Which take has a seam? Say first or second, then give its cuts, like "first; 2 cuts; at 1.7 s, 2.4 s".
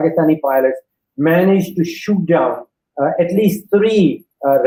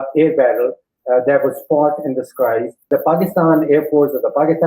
second; 1 cut; at 2.9 s